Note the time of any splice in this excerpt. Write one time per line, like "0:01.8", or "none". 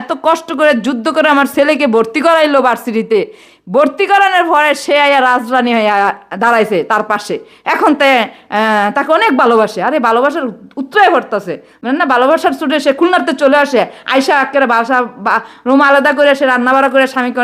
none